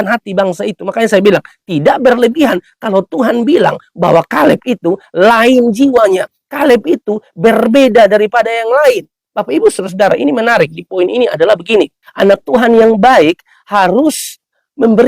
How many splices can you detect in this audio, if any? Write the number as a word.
one